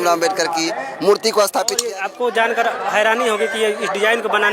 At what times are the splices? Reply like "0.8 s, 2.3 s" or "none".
1.8 s